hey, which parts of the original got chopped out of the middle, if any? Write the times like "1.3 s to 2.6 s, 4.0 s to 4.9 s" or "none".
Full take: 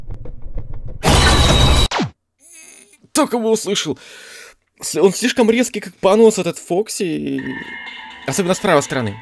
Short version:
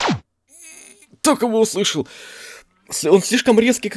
none